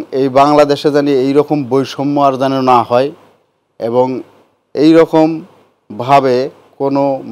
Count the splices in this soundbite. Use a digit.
0